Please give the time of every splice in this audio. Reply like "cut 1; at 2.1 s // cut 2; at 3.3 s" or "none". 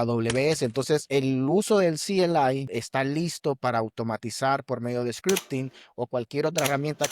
cut 1; at 1.1 s // cut 2; at 2.7 s